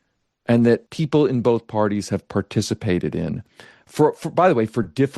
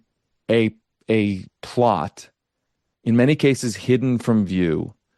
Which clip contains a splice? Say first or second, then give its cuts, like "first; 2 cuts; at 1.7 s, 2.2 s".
first; 1 cut; at 0.9 s